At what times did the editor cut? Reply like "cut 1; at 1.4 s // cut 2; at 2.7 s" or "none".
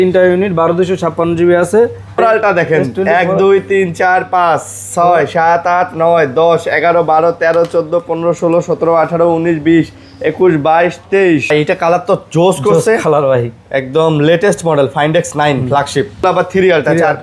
cut 1; at 2.2 s // cut 2; at 11.5 s // cut 3; at 16.2 s